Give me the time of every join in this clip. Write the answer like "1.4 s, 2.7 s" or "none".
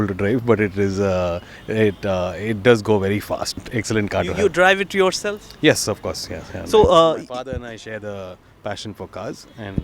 3.6 s